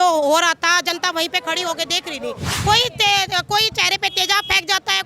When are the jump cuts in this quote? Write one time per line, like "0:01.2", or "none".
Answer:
0:02.5